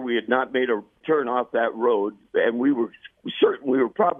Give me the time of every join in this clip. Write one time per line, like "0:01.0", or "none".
0:01.0
0:02.2